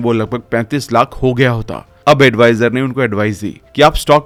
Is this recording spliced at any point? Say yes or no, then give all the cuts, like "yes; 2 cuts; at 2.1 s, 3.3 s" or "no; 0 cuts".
no; 0 cuts